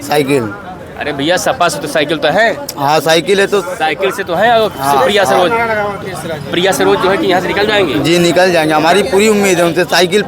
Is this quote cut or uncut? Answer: uncut